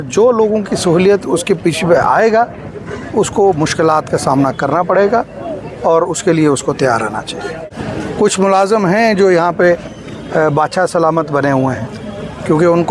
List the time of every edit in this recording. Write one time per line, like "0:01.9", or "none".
0:07.6